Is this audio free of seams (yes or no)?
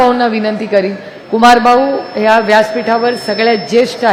yes